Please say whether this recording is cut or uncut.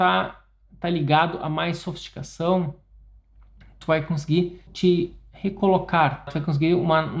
cut